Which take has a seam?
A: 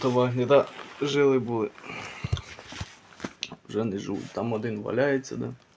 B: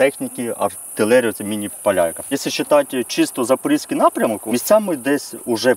B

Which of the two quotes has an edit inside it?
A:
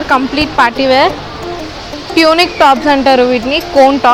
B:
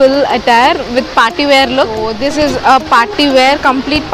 B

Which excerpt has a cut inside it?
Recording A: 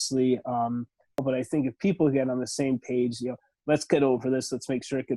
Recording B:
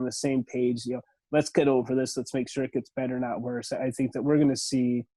A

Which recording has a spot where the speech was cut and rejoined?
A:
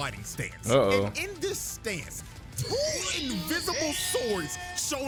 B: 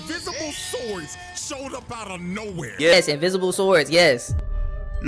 B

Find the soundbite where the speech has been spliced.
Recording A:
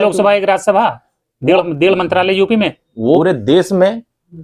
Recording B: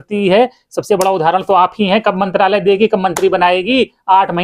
A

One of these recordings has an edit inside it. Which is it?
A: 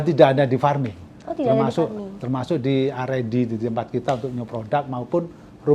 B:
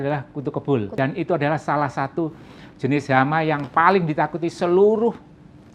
B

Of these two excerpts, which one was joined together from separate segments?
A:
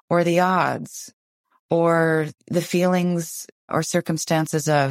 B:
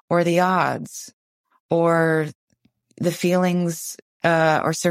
A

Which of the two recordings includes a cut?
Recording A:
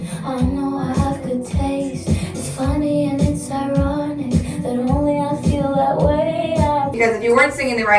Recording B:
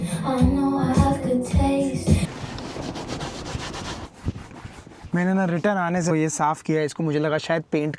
B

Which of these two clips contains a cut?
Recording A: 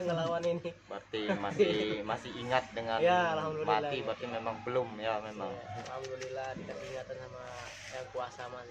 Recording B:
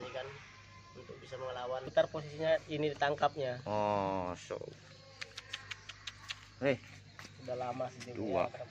B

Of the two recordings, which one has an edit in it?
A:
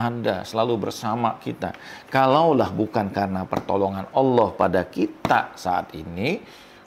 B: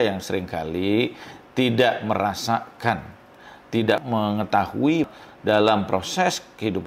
B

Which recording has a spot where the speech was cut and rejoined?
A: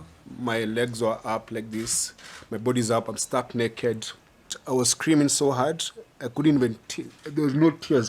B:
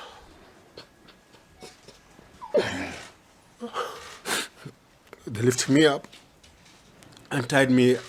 A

